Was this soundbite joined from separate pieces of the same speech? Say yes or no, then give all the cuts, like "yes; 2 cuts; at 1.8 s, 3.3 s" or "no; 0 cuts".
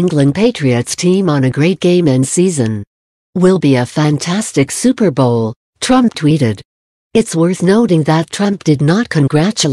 no; 0 cuts